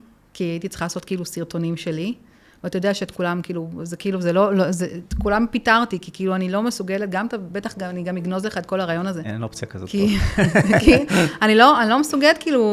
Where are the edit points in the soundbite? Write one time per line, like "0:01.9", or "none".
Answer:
0:09.3

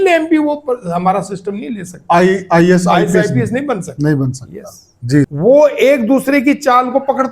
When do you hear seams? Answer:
0:05.3

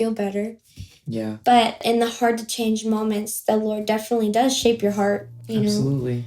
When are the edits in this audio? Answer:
0:01.8
0:05.3

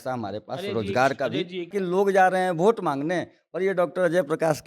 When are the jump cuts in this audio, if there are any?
0:01.7

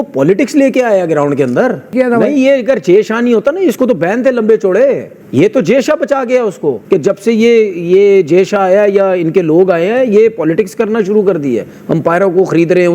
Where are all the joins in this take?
0:01.9
0:05.1
0:06.8

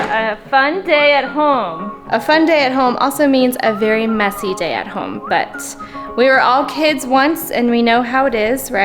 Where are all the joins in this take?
none

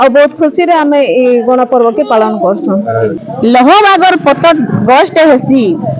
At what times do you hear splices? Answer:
0:03.2

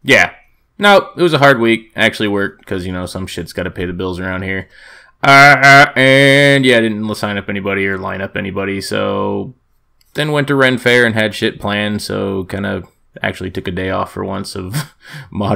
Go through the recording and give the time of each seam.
0:03.7

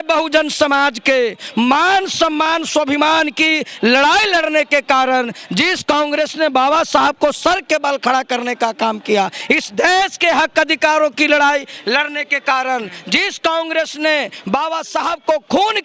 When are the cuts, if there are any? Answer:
none

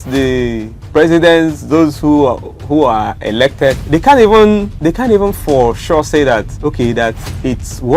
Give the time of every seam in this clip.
0:03.8
0:04.7
0:06.5

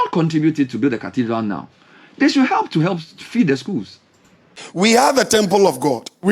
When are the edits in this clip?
0:04.6

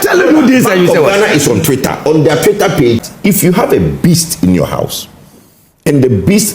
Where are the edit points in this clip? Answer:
0:03.0

